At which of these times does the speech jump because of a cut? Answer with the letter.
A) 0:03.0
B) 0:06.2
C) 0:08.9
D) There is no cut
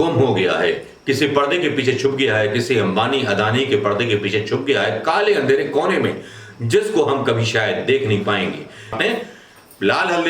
C